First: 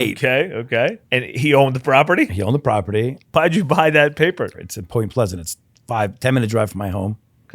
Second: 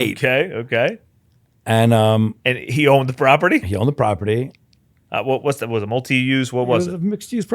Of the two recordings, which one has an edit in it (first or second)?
first